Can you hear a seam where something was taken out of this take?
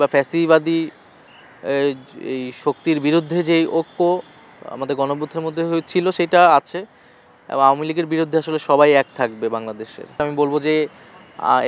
yes; 1 cut; at 10.1 s

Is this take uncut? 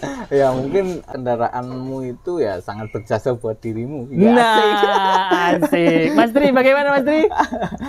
no; 1 cut; at 1.0 s

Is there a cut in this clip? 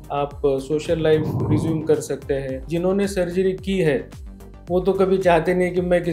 yes; 1 cut; at 2.6 s

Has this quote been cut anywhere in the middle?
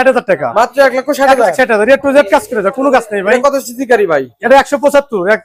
no; 0 cuts

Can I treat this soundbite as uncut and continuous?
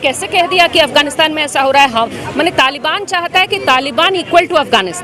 yes; 0 cuts

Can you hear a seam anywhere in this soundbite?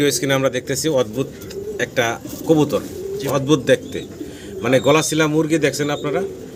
no; 0 cuts

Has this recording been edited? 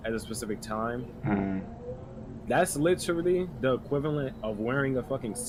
no; 0 cuts

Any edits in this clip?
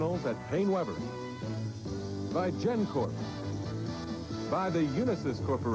yes; 1 cut; at 3.1 s

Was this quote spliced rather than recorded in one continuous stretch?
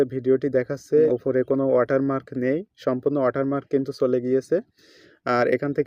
yes; 1 cut; at 1.1 s

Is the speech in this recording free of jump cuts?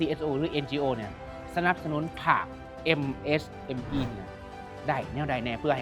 yes; 0 cuts

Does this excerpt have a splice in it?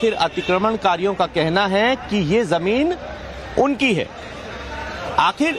yes; 1 cut; at 2.6 s

